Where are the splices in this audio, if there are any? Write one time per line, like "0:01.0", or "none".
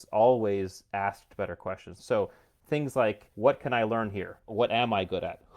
0:02.0
0:03.3
0:04.5